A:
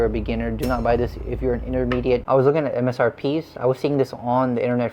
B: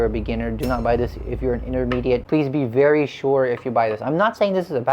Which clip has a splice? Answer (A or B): A